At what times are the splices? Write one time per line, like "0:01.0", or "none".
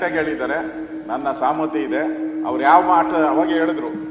none